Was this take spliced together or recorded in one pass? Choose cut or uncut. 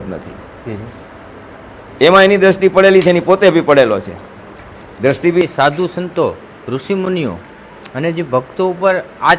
cut